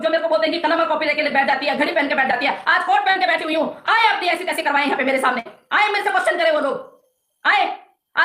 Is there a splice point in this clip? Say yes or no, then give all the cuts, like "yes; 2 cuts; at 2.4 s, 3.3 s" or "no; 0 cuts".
no; 0 cuts